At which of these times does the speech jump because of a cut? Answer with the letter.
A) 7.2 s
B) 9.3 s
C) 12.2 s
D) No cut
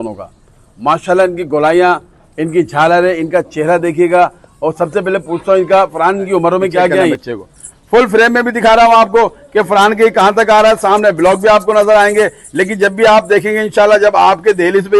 A